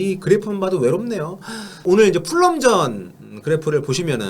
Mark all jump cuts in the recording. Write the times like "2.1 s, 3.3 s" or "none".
1.8 s